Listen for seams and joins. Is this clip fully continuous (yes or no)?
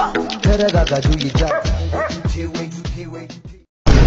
yes